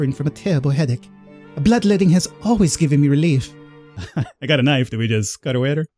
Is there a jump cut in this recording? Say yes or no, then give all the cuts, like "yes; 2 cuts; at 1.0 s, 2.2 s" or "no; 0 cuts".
yes; 1 cut; at 4.1 s